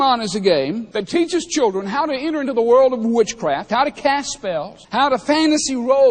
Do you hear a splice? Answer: yes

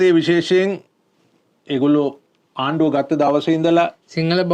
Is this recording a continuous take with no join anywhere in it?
yes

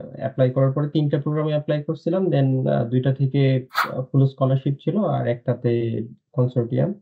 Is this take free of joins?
yes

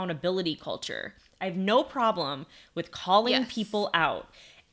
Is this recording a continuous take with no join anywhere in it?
yes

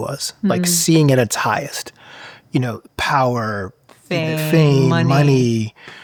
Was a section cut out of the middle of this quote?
no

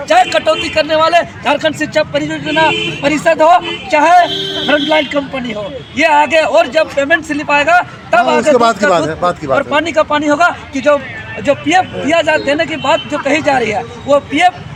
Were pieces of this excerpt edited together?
no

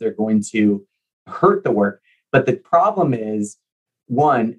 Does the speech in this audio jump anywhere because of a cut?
yes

